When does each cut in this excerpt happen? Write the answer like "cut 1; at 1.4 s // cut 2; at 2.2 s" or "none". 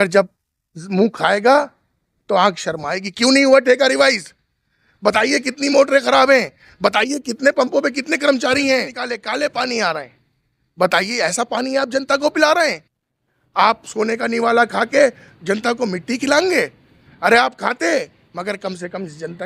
cut 1; at 9.1 s